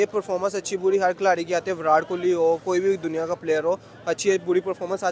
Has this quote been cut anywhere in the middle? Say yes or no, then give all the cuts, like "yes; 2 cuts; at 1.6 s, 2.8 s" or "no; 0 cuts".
no; 0 cuts